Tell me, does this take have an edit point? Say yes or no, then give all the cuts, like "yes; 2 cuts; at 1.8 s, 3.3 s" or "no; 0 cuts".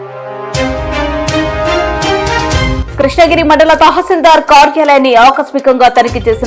yes; 1 cut; at 2.8 s